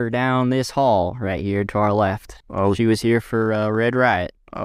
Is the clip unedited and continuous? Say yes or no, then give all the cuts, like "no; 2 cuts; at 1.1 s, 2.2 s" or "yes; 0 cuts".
yes; 0 cuts